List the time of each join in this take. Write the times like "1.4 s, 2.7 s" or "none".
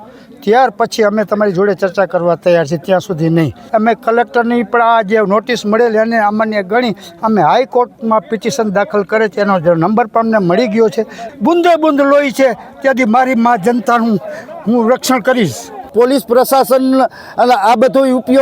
3.6 s, 11.2 s, 15.9 s

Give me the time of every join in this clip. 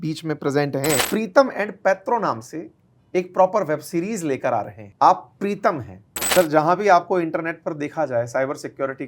1.0 s, 4.8 s, 6.1 s

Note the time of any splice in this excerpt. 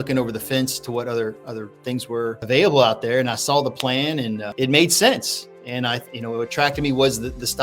2.4 s, 4.5 s

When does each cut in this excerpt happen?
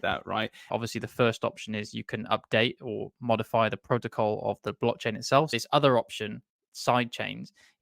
0.7 s, 5.5 s

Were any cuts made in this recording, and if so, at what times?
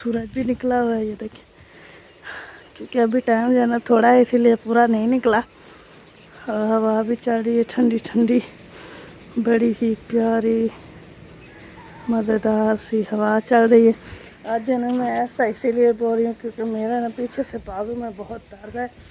none

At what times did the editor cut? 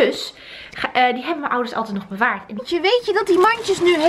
2.6 s

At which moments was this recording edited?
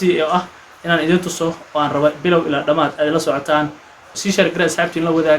4.1 s

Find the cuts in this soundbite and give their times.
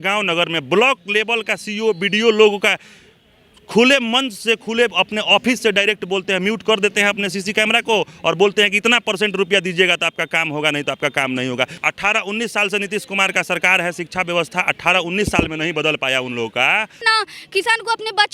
11.8 s, 17.0 s

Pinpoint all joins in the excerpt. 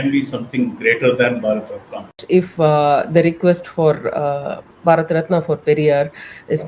2.2 s

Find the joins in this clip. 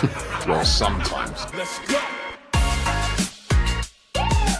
1.5 s

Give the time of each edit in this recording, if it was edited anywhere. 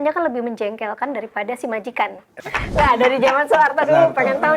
2.3 s

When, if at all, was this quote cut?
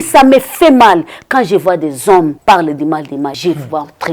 2.4 s, 3.4 s

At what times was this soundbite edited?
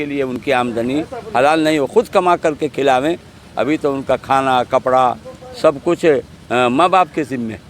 none

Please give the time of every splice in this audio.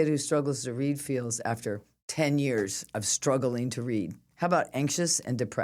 4.2 s

